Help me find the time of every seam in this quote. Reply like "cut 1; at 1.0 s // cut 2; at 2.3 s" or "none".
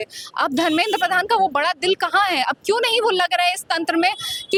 none